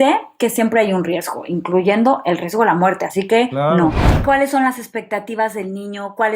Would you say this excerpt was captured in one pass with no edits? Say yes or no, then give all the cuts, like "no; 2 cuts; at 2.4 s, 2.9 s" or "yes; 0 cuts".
no; 1 cut; at 4.1 s